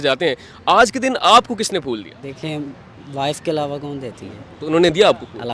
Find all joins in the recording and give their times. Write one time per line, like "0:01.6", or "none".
0:02.2